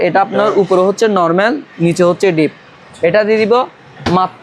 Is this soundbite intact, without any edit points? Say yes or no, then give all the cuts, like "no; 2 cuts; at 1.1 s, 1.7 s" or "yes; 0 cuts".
yes; 0 cuts